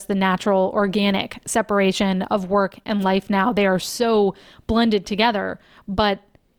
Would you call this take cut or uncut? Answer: uncut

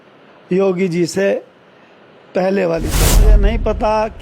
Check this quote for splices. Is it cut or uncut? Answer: cut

